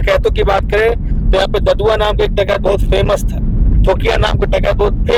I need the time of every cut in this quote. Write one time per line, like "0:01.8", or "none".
none